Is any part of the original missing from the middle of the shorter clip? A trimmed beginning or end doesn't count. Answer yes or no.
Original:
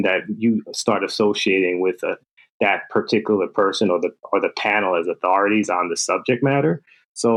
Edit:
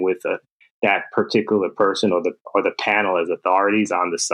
no